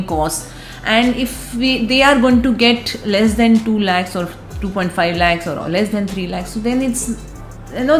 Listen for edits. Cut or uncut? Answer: uncut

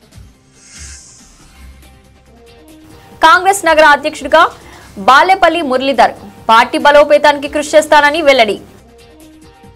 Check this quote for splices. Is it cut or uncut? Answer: uncut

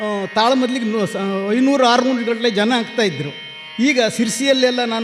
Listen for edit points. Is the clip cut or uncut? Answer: uncut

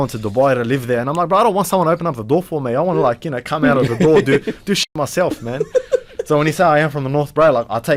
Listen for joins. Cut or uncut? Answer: uncut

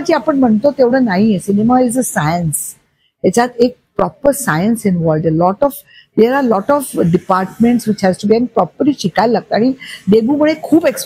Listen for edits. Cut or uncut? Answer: uncut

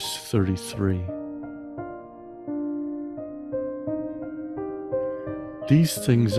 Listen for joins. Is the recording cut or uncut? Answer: cut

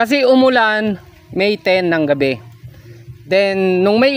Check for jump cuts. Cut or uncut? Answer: uncut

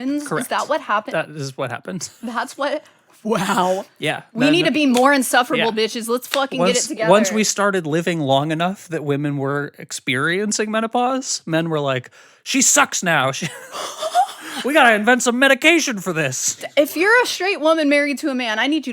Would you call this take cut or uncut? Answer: cut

